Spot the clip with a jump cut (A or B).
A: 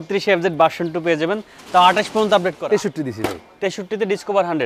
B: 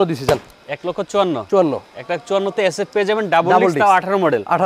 A